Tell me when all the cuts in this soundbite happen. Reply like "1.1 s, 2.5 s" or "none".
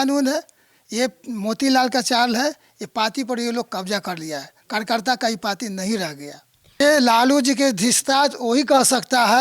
6.8 s